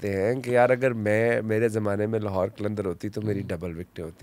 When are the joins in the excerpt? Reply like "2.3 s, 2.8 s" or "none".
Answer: none